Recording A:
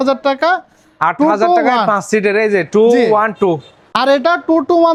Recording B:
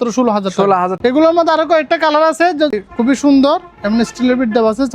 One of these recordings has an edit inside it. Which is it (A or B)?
B